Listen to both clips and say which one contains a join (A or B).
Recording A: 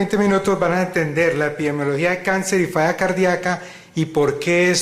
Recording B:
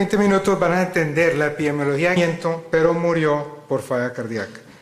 A